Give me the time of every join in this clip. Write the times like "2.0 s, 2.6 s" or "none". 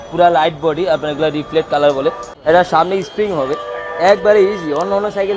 2.3 s